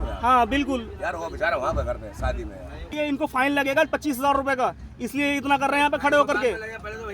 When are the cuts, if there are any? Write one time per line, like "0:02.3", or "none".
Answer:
0:02.9